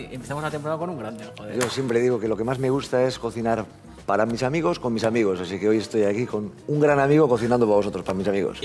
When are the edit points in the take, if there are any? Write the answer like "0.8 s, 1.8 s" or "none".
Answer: 1.7 s